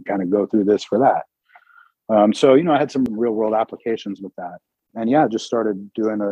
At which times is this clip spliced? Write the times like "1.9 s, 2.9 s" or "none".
3.1 s